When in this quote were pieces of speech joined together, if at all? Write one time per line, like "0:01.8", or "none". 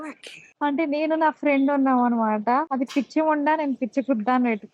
0:02.7